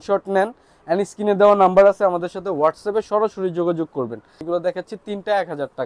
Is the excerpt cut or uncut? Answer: cut